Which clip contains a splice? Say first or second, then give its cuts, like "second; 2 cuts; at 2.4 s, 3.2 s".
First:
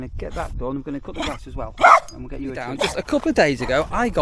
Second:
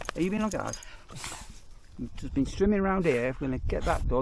first; 1 cut; at 2.9 s